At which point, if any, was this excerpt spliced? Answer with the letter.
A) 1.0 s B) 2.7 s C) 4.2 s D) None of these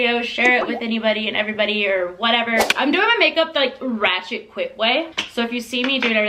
B